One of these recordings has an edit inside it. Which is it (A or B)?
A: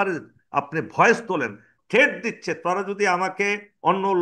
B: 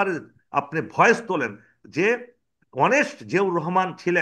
A